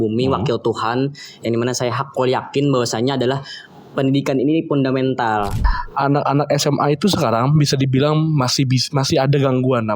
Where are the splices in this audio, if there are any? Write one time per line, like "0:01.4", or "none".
0:05.6